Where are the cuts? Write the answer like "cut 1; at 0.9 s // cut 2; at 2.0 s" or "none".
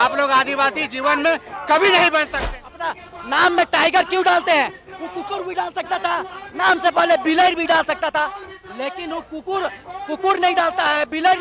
cut 1; at 2.7 s